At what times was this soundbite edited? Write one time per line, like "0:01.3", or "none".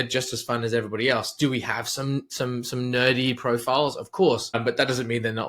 0:04.5